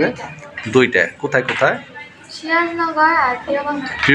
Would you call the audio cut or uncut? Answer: uncut